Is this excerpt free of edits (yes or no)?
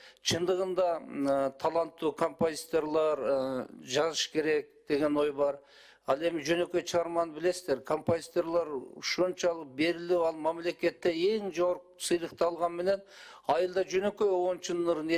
yes